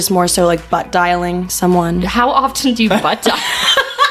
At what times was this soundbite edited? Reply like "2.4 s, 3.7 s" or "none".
2.1 s